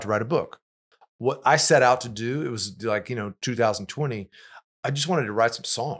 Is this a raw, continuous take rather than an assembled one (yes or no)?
yes